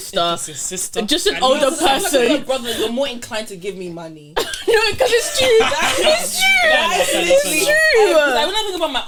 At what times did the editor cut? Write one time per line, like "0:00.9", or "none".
none